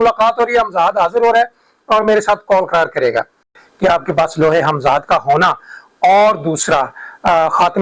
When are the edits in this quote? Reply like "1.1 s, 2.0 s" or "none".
3.6 s